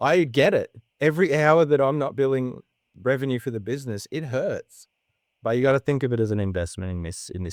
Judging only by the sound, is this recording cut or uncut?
uncut